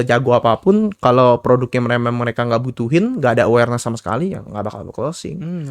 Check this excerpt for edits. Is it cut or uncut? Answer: uncut